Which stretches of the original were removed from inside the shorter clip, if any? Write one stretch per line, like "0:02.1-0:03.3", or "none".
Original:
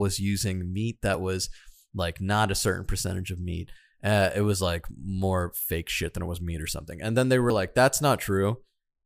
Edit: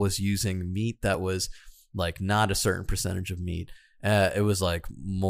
none